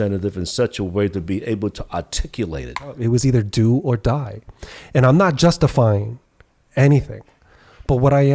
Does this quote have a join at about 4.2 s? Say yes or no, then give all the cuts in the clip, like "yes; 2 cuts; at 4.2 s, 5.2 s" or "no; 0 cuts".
no; 1 cut; at 3.0 s